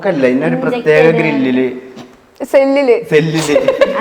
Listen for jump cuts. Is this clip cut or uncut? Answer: uncut